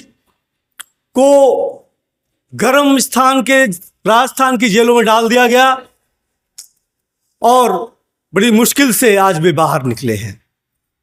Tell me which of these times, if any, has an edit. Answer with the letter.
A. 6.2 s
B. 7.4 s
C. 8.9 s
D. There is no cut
D